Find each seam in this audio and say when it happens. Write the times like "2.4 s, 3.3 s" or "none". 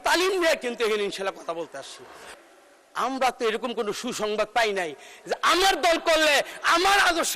2.3 s